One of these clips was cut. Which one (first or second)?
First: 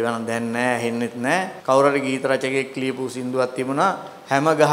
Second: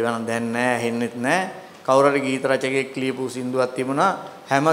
first